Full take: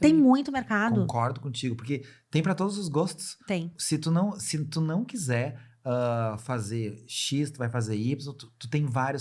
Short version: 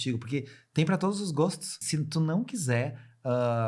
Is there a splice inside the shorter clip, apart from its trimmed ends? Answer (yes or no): yes